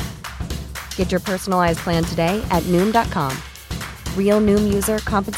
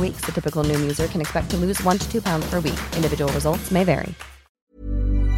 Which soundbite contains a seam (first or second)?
second